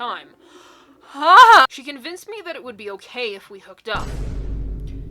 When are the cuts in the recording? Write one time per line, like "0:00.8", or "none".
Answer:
0:01.7